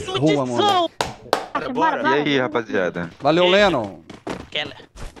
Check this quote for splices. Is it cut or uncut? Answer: cut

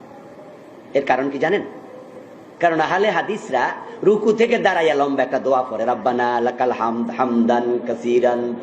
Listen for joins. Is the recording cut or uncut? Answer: uncut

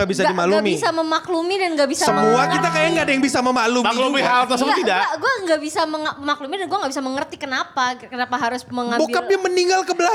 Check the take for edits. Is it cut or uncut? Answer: uncut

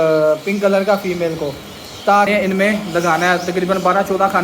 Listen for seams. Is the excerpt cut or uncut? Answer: cut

